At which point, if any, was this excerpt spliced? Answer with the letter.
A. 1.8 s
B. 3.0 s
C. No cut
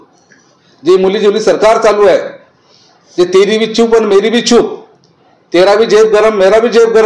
C